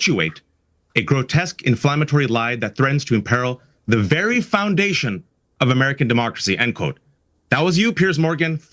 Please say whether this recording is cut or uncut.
uncut